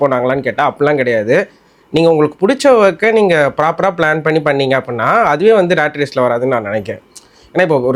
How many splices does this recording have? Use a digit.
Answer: 0